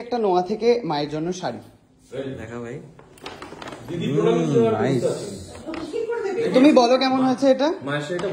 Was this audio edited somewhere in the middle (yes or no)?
no